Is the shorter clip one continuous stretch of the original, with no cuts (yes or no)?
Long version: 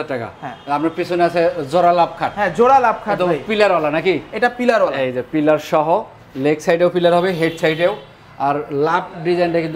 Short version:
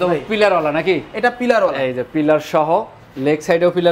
yes